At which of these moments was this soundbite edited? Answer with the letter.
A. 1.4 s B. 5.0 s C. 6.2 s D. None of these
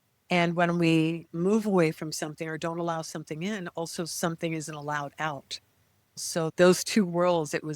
C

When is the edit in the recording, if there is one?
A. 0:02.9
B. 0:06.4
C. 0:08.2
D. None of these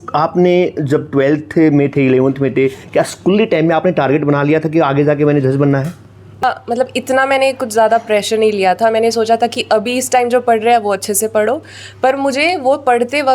B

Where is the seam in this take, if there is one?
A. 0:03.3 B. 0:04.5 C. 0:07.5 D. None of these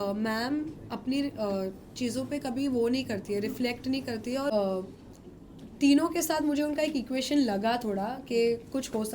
B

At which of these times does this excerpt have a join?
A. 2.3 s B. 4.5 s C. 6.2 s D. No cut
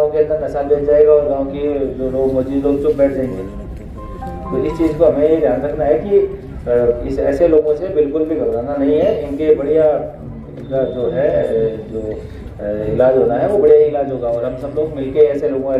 D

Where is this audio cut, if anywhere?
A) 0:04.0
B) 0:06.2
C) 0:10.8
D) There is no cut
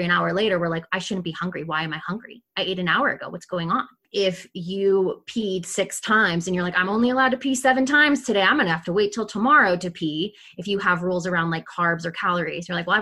A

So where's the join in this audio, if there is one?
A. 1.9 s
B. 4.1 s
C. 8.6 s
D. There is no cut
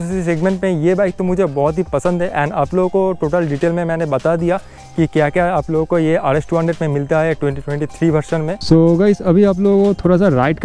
D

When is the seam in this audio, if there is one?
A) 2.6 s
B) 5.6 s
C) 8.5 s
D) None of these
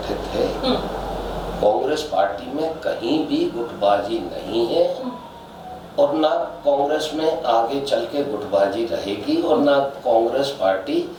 D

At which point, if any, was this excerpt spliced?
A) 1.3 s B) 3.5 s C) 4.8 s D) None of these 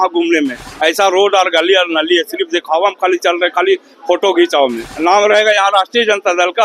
C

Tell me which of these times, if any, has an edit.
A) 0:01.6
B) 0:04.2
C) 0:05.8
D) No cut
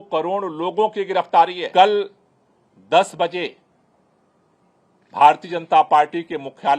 A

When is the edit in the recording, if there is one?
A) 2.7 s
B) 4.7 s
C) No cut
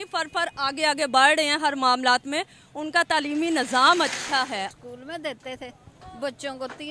B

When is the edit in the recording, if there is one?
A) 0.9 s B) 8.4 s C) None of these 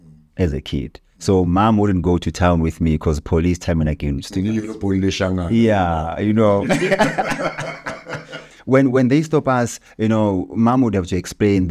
B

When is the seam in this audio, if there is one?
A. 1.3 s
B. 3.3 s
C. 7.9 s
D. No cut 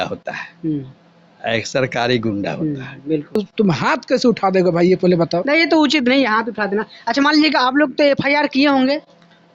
B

